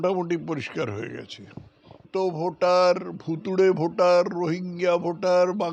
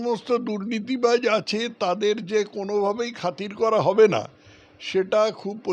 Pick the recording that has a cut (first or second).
first